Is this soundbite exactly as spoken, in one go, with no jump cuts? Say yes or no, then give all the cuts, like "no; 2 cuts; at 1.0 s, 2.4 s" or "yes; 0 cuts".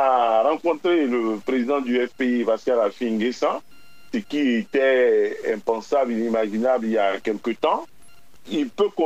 yes; 0 cuts